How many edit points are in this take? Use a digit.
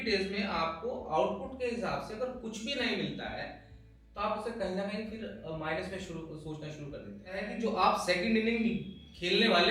1